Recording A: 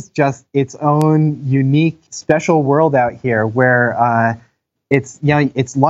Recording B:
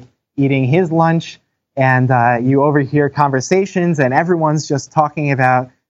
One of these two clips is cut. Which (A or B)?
A